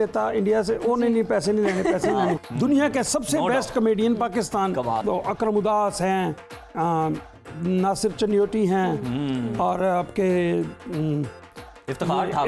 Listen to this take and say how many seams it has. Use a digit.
2